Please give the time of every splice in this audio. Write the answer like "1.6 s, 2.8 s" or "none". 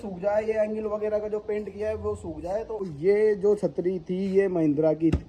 2.8 s